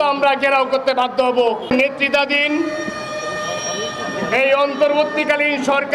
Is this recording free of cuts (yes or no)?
yes